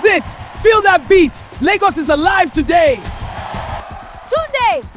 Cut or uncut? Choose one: cut